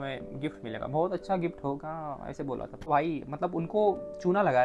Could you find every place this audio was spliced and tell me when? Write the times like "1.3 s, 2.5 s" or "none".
2.9 s

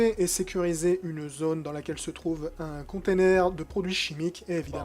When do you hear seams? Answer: 3.0 s

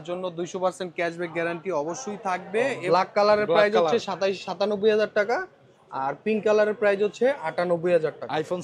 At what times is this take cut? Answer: 2.8 s

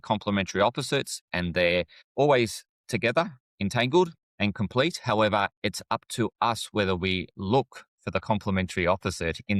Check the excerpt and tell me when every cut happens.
2.0 s, 4.2 s

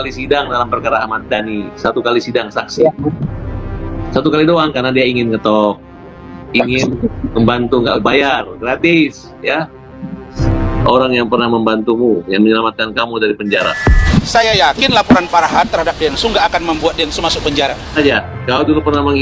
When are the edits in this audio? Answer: 10.3 s, 14.0 s, 18.0 s

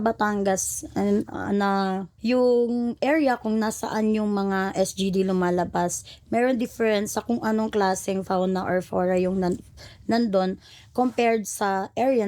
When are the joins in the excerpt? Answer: 2.1 s

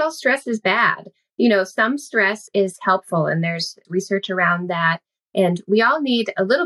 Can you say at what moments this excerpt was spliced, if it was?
2.4 s, 3.8 s

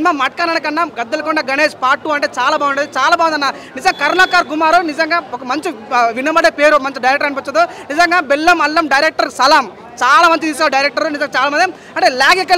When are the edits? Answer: none

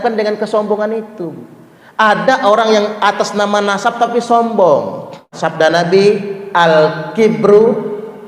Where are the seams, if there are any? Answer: 5.3 s

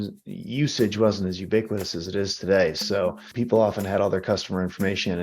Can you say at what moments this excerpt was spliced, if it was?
3.2 s

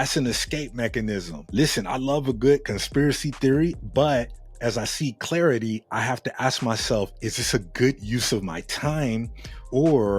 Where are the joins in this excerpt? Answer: none

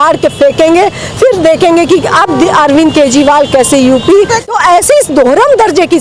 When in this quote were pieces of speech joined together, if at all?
4.5 s

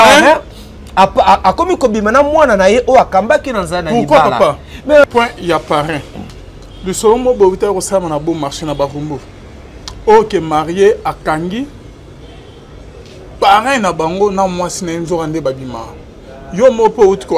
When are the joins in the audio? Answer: 5.0 s

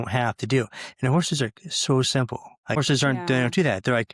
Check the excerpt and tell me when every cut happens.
2.8 s

